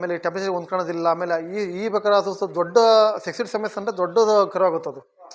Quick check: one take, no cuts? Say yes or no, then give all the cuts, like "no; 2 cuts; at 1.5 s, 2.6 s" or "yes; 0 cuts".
yes; 0 cuts